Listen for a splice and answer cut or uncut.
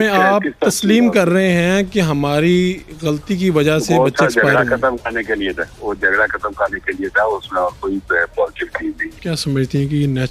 cut